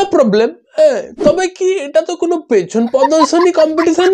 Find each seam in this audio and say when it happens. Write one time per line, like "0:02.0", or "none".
none